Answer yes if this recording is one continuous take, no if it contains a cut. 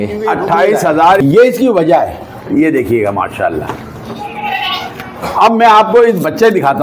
no